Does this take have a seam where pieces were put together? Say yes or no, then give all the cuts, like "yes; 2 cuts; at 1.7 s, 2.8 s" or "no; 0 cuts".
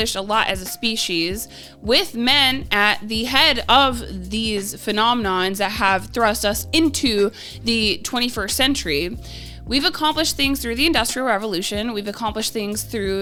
no; 0 cuts